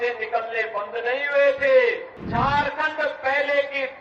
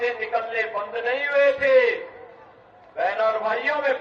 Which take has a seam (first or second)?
first